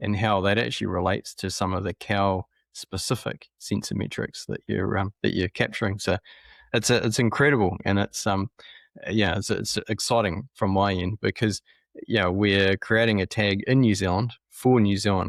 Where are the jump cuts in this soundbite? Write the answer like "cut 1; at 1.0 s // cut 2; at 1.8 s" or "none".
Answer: none